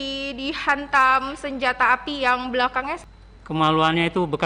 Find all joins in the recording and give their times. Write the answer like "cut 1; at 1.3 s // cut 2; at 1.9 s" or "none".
cut 1; at 3.0 s